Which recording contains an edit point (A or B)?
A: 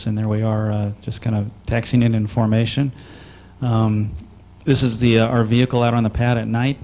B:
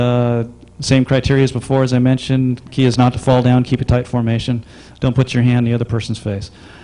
B